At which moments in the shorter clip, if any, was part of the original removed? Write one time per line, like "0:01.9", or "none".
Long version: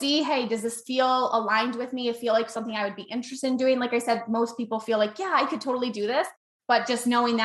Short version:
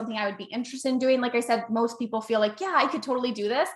none